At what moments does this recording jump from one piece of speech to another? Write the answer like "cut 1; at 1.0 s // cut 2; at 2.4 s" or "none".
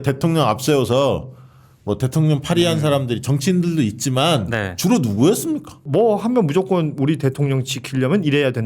cut 1; at 5.8 s